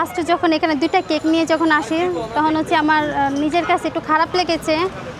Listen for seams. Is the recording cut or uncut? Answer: uncut